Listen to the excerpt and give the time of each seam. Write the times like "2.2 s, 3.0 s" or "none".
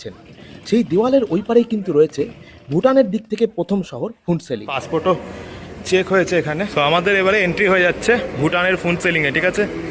4.7 s, 6.7 s